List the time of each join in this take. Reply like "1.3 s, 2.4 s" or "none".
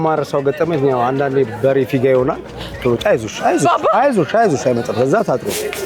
none